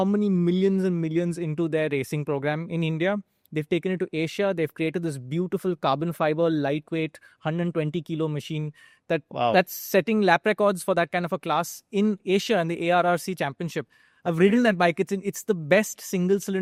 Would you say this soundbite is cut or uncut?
uncut